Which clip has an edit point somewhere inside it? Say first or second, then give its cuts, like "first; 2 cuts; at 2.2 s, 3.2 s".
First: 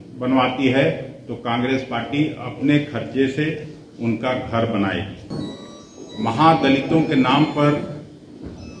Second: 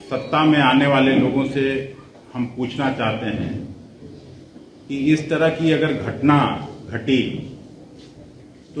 first; 1 cut; at 5.3 s